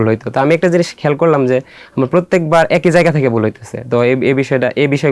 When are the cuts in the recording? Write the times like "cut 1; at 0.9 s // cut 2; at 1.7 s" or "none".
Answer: none